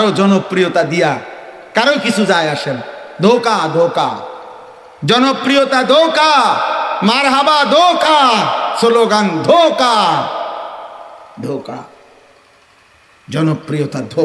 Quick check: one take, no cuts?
yes; 0 cuts

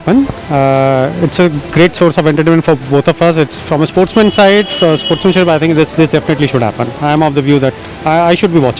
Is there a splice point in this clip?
no; 0 cuts

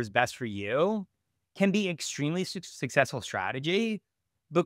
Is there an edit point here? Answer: no; 0 cuts

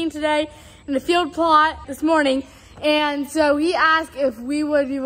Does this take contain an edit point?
no; 0 cuts

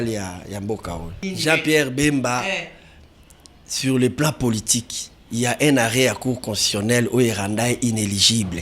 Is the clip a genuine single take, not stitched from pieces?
no; 1 cut; at 1.2 s

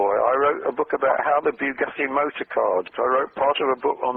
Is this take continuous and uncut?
no; 1 cut; at 2.9 s

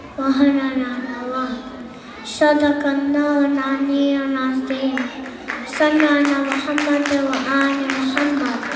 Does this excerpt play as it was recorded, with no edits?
no; 1 cut; at 6.0 s

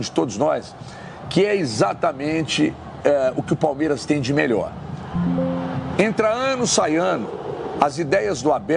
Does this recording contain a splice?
no; 0 cuts

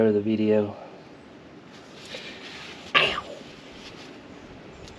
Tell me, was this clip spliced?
no; 0 cuts

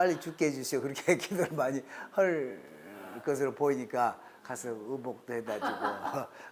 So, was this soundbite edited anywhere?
no; 0 cuts

